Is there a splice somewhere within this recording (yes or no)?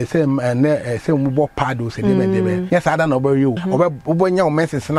yes